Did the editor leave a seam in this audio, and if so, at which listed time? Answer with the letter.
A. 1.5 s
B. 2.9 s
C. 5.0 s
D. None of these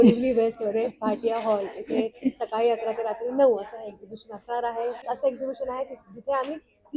C